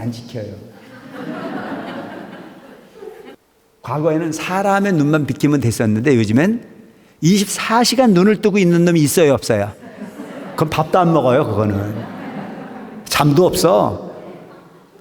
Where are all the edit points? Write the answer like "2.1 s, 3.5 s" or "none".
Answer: 3.3 s